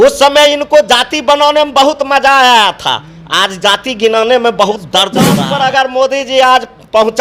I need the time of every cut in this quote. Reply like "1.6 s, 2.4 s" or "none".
5.4 s